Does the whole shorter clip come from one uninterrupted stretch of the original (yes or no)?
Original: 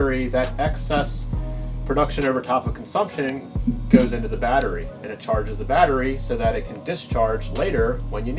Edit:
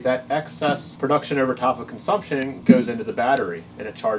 no